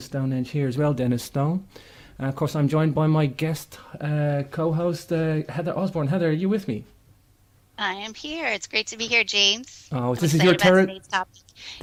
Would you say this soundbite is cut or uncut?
uncut